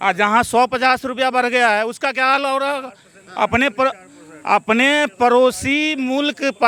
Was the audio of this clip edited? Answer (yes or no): no